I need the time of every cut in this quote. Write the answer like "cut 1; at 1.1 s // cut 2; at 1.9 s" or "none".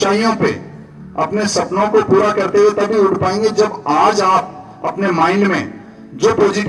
none